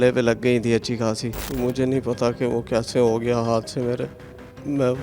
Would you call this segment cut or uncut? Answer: cut